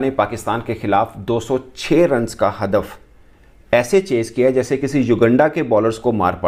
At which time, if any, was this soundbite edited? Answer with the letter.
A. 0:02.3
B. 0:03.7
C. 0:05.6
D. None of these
D